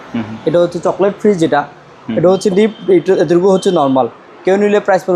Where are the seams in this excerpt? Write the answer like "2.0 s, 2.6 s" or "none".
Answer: none